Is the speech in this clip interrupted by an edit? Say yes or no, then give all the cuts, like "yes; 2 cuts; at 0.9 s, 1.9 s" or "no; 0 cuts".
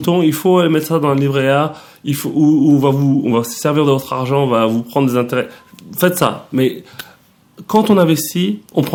no; 0 cuts